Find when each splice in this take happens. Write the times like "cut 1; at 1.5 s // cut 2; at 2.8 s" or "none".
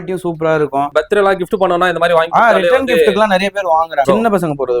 cut 1; at 0.9 s // cut 2; at 4.1 s